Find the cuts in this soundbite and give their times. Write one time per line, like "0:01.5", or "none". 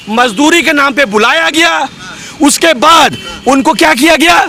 none